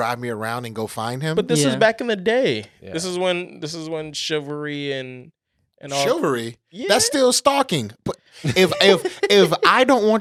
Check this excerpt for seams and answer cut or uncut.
uncut